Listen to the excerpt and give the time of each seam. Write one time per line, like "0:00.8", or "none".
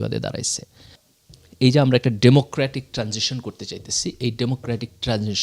0:00.9